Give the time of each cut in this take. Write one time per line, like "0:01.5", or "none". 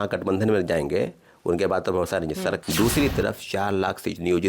0:02.6